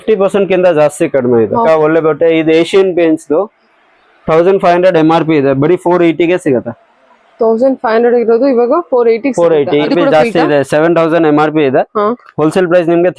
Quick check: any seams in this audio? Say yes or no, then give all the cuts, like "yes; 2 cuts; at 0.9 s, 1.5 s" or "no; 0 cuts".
yes; 2 cuts; at 1.6 s, 9.9 s